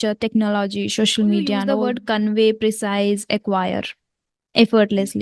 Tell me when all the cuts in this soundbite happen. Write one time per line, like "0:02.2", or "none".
0:01.7